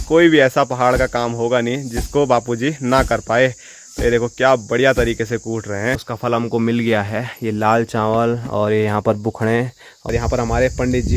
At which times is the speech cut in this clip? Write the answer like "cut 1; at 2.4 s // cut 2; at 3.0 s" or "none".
cut 1; at 6.1 s // cut 2; at 10.1 s

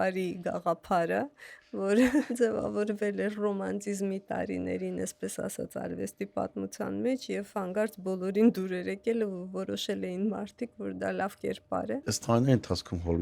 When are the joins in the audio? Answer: cut 1; at 2.3 s // cut 2; at 12.0 s

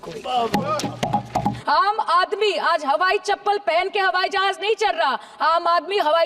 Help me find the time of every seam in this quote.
cut 1; at 1.5 s

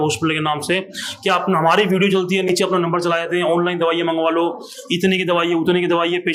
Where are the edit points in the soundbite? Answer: none

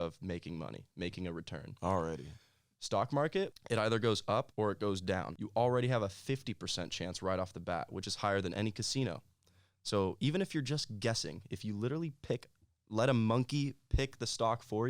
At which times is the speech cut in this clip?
cut 1; at 3.6 s // cut 2; at 4.5 s // cut 3; at 5.4 s

